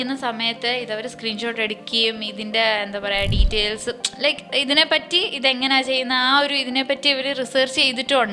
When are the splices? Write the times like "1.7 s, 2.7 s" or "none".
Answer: none